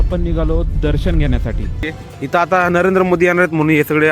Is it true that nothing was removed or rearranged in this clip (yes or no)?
no